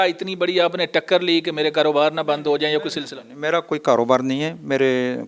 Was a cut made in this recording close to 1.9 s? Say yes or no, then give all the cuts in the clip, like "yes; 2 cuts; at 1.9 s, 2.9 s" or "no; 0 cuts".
no; 0 cuts